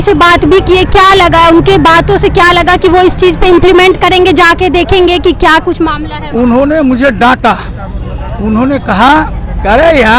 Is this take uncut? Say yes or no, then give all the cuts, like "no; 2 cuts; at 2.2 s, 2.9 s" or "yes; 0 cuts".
yes; 0 cuts